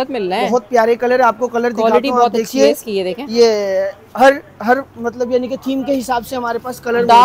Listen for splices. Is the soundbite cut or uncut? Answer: uncut